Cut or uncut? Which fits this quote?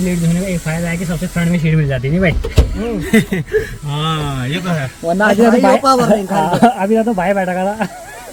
uncut